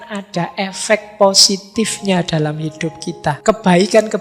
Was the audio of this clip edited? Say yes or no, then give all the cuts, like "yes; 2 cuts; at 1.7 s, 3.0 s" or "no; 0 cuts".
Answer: yes; 1 cut; at 3.1 s